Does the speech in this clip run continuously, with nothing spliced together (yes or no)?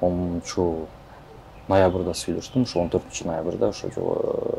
yes